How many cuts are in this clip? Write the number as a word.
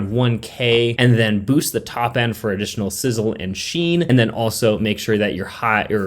two